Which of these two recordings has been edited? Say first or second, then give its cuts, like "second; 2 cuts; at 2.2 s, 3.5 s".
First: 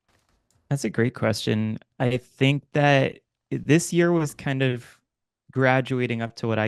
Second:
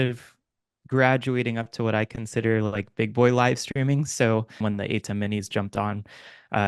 second; 1 cut; at 4.6 s